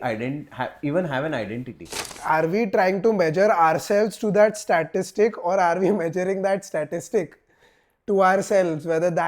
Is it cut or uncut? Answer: cut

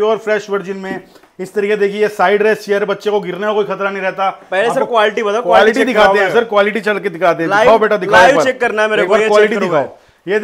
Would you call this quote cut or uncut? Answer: uncut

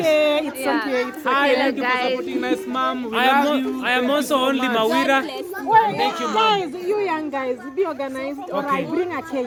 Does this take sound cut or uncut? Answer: uncut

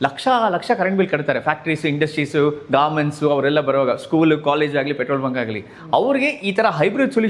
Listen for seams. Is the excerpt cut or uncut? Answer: uncut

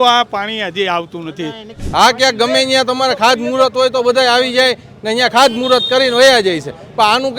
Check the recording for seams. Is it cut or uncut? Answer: cut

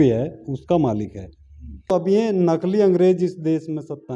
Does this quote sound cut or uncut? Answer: cut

